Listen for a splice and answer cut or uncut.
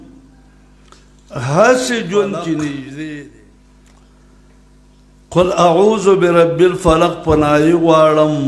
cut